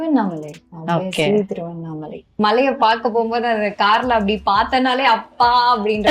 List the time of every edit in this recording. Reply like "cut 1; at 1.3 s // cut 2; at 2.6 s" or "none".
cut 1; at 2.3 s